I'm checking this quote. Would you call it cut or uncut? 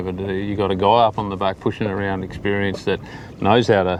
uncut